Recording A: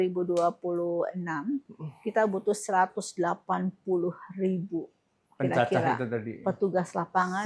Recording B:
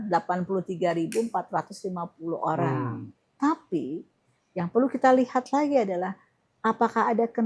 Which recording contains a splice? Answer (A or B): B